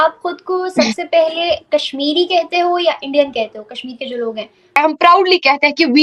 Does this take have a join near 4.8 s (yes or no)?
yes